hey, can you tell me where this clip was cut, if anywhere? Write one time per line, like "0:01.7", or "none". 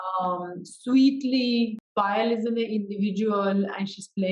0:01.8